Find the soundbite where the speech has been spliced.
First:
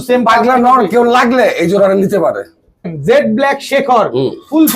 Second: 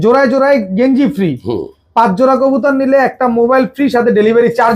first; 1 cut; at 2.9 s

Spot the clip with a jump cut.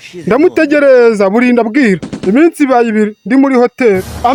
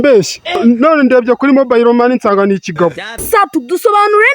second; 1 cut; at 3.1 s

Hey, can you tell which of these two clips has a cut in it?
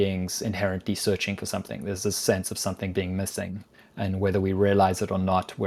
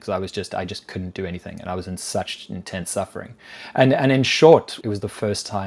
second; 1 cut; at 4.7 s

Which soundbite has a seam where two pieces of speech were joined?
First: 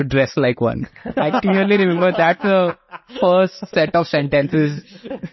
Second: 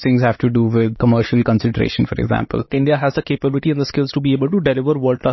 second; 2 cuts; at 0.9 s, 2.7 s

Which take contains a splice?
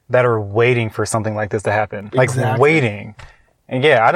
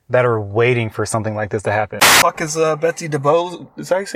second; 1 cut; at 2.0 s

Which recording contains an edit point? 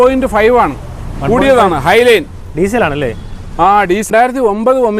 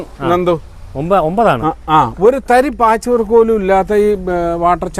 first; 1 cut; at 4.1 s

